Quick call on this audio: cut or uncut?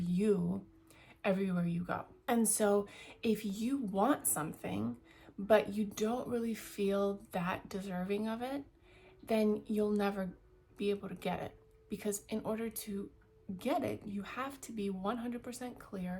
cut